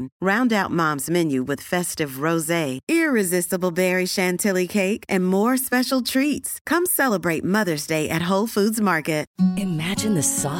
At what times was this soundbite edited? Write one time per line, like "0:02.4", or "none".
none